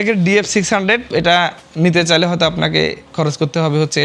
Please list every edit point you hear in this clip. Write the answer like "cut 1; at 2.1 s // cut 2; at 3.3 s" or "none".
cut 1; at 1.1 s